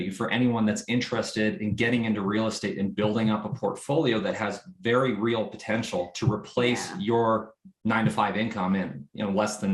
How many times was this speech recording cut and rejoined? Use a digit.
0